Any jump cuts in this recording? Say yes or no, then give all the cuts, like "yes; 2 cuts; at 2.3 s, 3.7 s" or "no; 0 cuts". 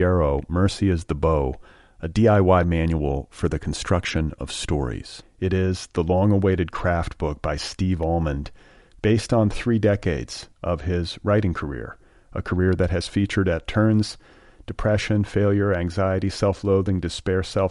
no; 0 cuts